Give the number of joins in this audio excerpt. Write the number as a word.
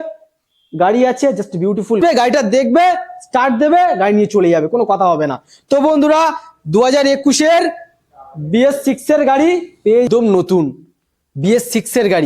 two